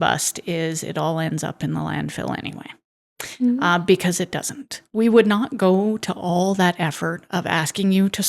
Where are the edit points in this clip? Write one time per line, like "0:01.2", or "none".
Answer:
none